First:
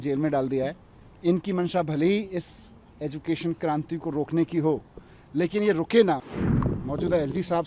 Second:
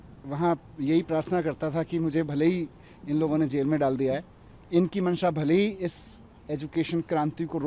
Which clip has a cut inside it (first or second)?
first